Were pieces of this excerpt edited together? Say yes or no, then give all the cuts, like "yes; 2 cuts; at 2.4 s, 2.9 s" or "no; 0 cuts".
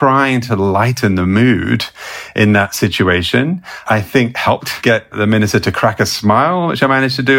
yes; 1 cut; at 4.8 s